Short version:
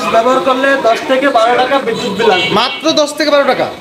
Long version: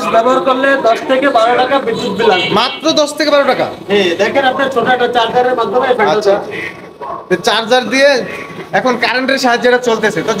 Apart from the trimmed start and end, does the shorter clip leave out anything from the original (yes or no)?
no